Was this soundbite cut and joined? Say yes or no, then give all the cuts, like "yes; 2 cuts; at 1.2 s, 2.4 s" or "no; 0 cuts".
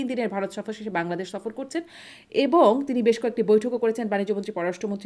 no; 0 cuts